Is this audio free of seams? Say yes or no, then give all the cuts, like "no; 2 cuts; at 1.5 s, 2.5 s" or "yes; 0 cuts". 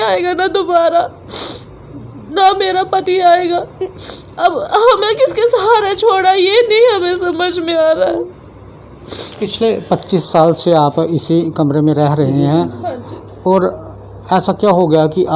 yes; 0 cuts